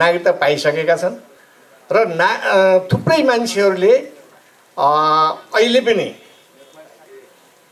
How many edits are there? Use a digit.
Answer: 0